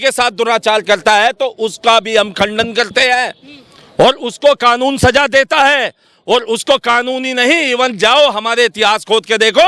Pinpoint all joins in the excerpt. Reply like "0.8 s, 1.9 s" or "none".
none